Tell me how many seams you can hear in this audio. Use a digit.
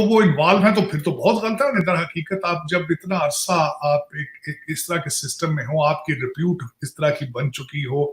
1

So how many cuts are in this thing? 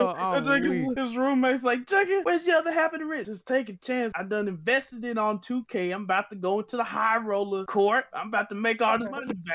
5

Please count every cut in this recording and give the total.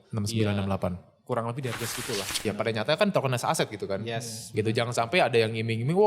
1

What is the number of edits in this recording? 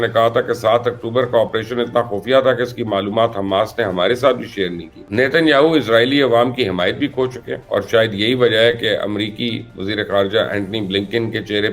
2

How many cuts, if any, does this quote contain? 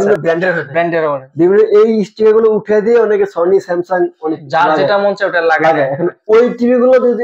0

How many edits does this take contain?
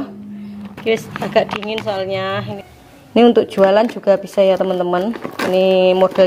1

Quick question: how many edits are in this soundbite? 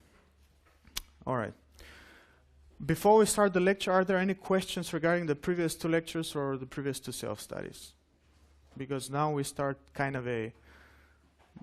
1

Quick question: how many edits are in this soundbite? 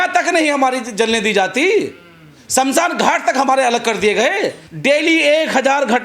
1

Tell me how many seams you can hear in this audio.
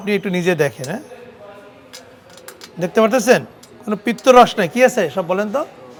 0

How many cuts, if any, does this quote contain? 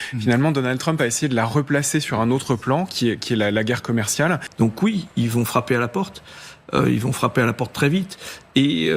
1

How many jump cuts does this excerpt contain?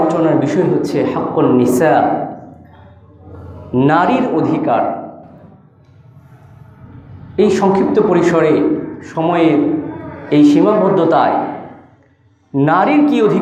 0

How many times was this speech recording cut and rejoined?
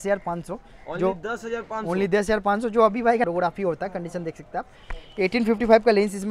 1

